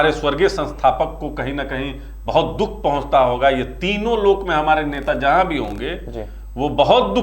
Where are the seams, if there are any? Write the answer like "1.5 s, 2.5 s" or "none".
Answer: none